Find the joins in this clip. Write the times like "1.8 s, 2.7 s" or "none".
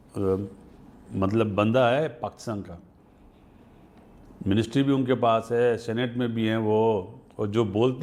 none

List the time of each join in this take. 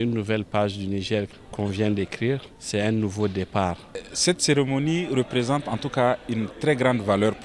1.4 s, 2.5 s, 4.1 s

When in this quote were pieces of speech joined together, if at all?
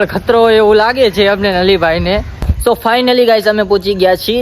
2.4 s

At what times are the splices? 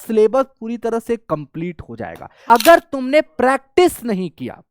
2.4 s

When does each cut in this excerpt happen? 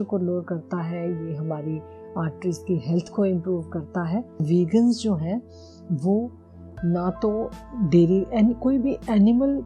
4.4 s

